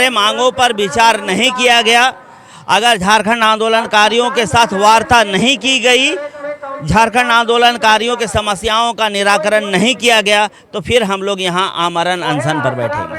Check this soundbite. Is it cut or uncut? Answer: uncut